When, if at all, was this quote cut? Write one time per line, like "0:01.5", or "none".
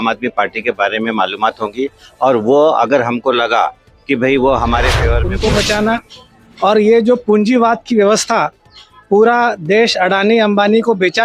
0:05.2